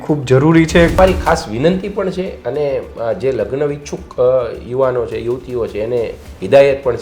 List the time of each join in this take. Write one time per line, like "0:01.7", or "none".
0:01.0